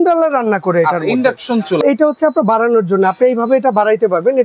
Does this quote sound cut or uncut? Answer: cut